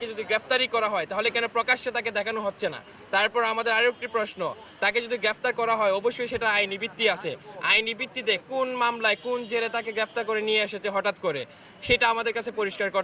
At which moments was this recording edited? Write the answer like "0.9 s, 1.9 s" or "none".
none